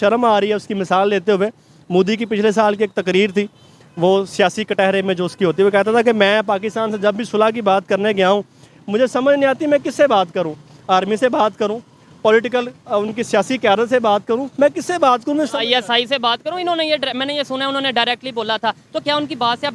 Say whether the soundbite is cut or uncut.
uncut